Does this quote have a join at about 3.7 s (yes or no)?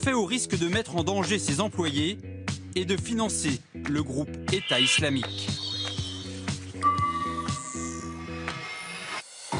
no